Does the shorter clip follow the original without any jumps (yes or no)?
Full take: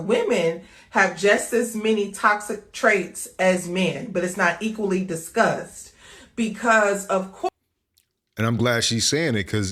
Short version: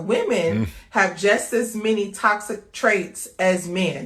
yes